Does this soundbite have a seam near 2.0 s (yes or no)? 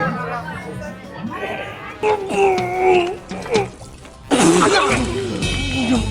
no